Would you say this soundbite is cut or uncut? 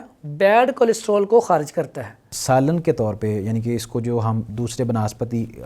cut